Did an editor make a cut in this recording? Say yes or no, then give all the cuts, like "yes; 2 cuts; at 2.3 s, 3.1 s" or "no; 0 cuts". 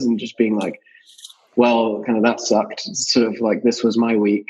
no; 0 cuts